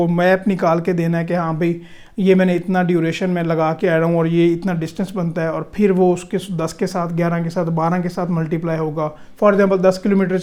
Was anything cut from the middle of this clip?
no; 0 cuts

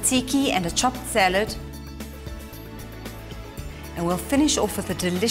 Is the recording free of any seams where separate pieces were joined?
yes; 0 cuts

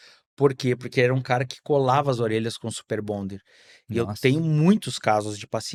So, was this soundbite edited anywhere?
no; 0 cuts

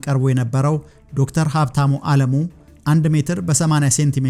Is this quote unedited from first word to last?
yes; 0 cuts

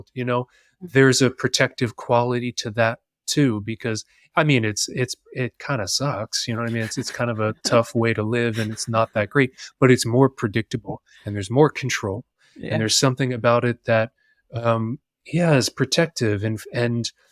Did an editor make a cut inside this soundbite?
no; 0 cuts

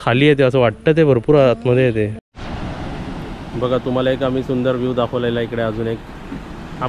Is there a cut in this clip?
yes; 1 cut; at 2.3 s

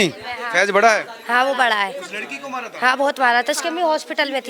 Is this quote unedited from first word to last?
yes; 0 cuts

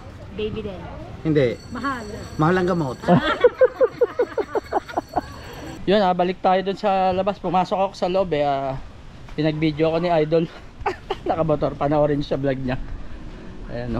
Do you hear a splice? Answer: no; 0 cuts

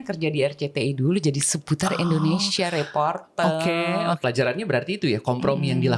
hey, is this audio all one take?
no; 1 cut; at 4.2 s

